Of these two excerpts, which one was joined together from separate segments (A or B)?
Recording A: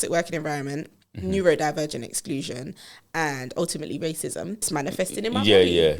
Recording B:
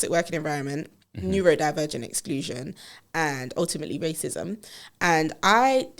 A